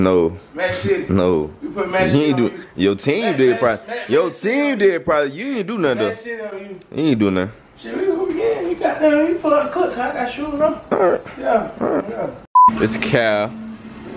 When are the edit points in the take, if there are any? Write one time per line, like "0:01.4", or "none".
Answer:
none